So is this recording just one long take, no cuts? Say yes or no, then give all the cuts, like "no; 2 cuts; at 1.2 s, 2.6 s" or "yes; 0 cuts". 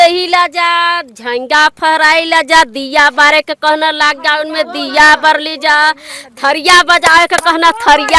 yes; 0 cuts